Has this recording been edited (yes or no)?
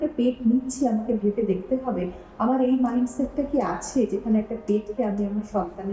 no